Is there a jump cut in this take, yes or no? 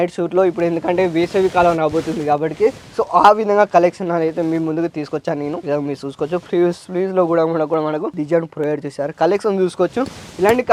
no